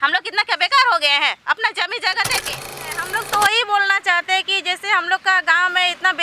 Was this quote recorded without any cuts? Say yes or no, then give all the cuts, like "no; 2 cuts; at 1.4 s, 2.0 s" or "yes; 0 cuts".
no; 1 cut; at 3.1 s